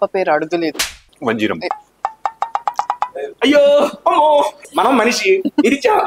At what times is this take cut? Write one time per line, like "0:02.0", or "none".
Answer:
0:01.0
0:04.6